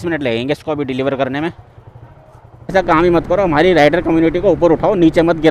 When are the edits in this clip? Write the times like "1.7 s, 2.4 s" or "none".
2.7 s